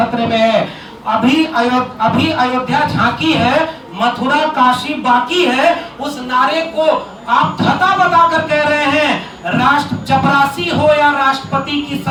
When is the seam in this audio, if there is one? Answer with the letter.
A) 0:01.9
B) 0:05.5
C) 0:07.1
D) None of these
D